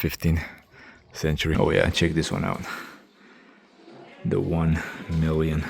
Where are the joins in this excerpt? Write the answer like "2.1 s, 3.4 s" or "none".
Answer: 1.5 s